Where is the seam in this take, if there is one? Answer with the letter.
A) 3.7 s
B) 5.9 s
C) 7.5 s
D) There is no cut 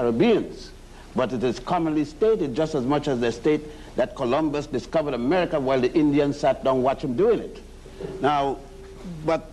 C